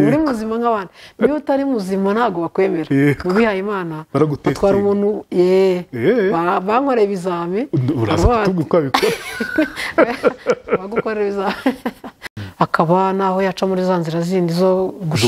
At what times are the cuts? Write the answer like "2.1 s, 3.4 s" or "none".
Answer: 12.2 s